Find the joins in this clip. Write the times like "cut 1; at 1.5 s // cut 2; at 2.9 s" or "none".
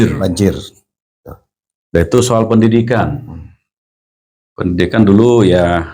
none